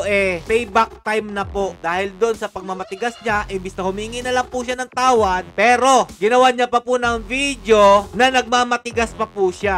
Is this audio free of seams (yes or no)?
yes